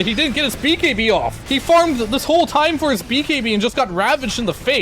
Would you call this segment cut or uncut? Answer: cut